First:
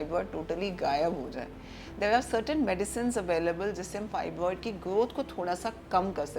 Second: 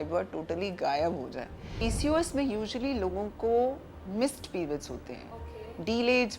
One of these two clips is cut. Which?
second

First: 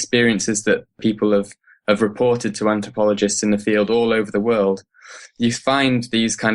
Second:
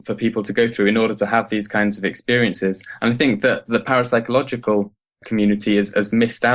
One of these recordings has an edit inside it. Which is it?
first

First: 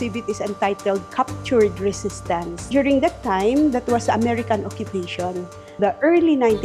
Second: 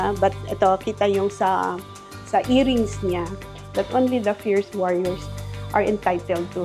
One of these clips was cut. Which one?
first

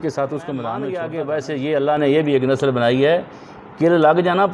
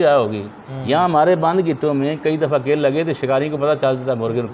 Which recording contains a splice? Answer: first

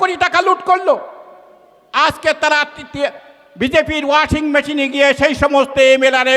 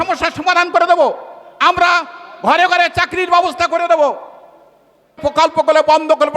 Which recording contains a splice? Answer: second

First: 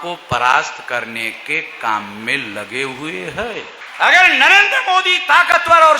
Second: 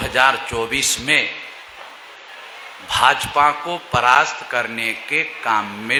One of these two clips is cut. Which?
first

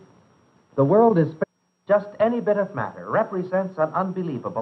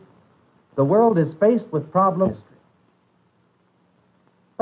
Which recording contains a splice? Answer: second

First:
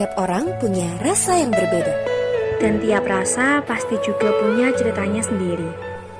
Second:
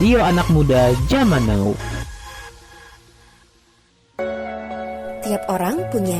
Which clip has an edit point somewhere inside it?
second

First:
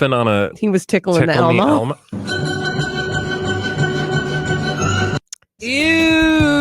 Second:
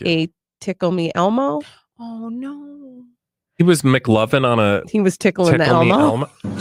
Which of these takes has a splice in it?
first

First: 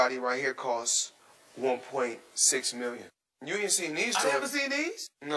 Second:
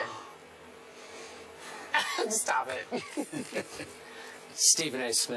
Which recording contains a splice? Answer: second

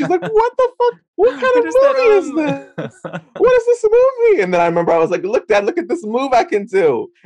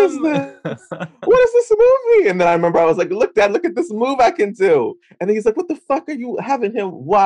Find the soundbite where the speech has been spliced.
first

